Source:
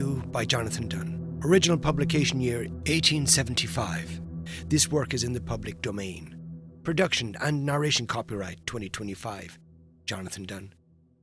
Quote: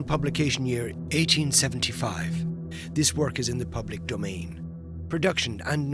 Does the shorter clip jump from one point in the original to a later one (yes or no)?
no